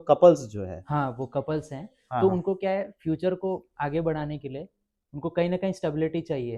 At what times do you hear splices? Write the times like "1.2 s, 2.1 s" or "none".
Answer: none